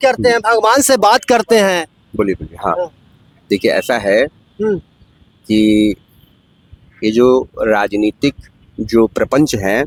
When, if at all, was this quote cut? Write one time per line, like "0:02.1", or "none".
none